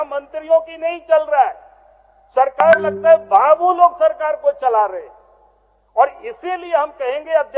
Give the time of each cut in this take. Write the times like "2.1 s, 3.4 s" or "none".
none